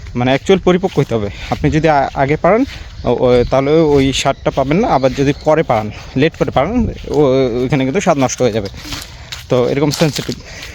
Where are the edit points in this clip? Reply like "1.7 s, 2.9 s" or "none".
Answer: none